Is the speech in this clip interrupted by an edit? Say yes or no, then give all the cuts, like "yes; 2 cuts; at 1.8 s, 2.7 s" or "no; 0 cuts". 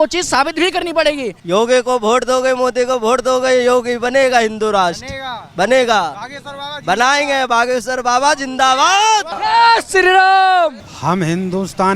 yes; 3 cuts; at 1.3 s, 9.3 s, 10.9 s